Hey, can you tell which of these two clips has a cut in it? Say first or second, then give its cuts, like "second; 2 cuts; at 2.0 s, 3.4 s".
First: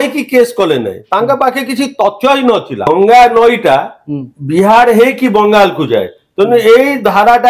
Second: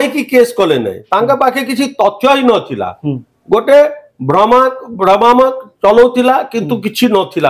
first; 1 cut; at 2.9 s